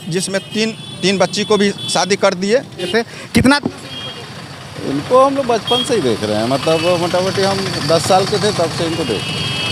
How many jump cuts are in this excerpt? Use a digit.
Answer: 1